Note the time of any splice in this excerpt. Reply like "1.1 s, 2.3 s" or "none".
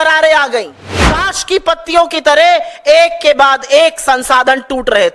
1.3 s